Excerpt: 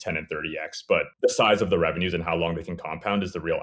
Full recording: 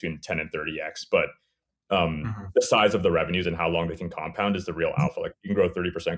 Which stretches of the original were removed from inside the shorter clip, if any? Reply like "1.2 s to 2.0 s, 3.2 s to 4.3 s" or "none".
1.3 s to 2.4 s

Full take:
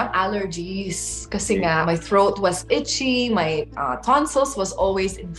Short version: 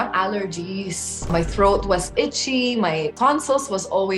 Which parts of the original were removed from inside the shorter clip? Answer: 1.3 s to 1.8 s, 3.7 s to 4.0 s

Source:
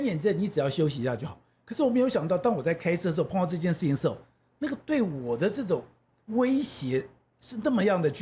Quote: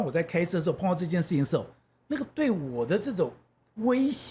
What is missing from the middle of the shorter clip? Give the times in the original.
none

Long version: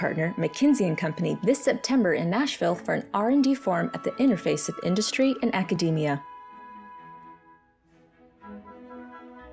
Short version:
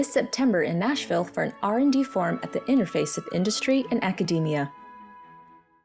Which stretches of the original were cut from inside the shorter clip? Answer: 6.2 s to 6.4 s

